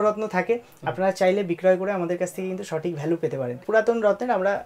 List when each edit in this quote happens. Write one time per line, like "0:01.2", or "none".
0:03.6